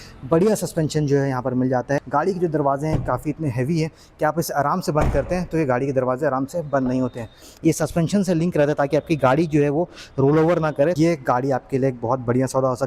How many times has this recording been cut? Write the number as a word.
three